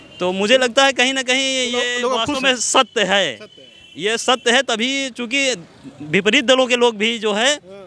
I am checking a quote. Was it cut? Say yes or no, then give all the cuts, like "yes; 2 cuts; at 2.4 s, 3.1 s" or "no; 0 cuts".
no; 0 cuts